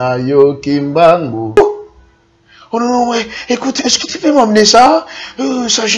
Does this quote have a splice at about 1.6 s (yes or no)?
yes